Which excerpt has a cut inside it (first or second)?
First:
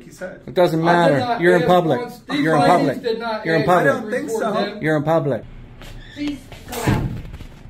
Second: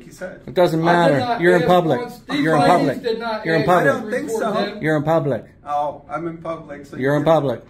first